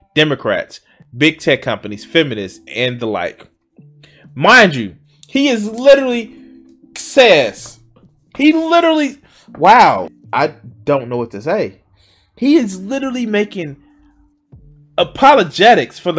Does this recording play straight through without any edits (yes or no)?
no